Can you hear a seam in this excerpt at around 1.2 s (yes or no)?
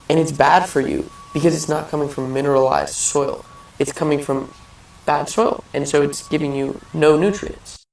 yes